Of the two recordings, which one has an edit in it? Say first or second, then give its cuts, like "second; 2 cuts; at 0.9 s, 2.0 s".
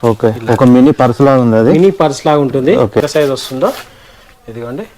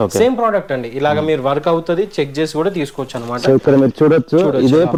first; 1 cut; at 3.0 s